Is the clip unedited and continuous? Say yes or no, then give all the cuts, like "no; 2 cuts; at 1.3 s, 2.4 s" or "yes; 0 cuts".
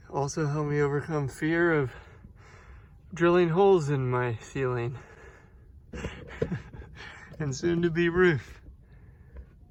yes; 0 cuts